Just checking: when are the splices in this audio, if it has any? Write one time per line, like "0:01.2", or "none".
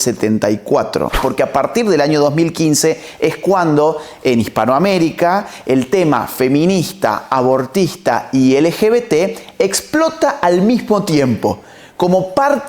0:01.2

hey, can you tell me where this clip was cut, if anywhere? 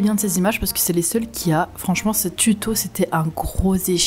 none

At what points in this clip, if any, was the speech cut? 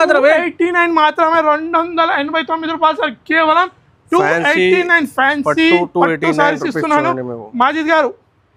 none

